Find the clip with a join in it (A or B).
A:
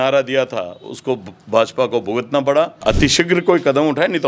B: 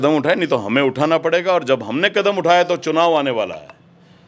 A